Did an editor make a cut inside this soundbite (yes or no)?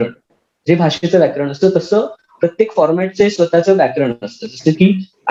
no